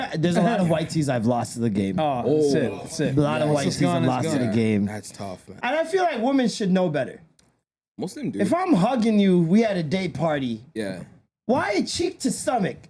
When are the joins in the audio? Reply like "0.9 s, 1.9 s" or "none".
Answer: 5.5 s